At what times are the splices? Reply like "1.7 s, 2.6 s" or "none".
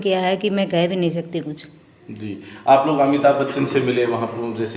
none